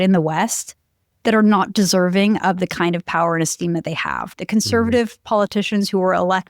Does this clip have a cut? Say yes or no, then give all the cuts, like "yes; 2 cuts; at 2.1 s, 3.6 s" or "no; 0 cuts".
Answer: yes; 1 cut; at 4.2 s